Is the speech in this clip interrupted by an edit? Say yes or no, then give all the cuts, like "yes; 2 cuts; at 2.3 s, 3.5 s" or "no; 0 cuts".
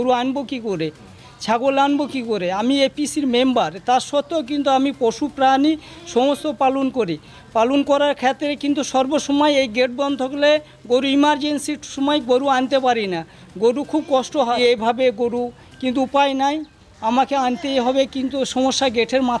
no; 0 cuts